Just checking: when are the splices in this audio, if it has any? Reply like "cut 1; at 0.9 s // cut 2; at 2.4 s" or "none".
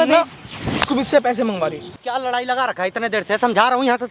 cut 1; at 1.9 s